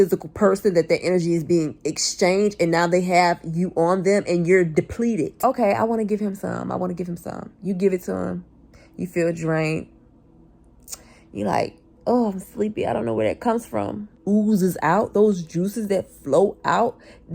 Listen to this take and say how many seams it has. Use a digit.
2